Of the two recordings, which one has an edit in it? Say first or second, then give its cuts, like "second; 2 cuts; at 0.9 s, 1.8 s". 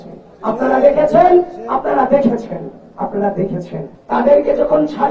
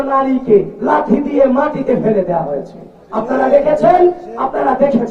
first; 1 cut; at 3.9 s